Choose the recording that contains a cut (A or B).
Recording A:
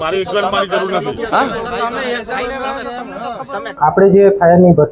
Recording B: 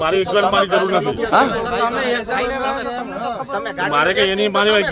A